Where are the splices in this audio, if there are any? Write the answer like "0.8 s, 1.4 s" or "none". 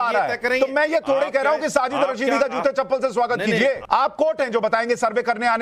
3.8 s